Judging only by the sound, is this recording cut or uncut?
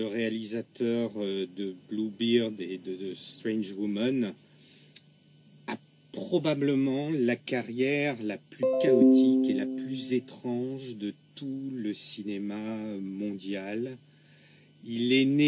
uncut